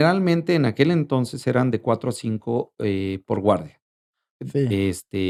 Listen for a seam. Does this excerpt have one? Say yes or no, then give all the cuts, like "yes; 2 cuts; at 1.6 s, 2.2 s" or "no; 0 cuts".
no; 0 cuts